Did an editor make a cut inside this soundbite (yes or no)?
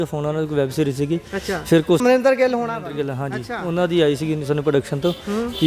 yes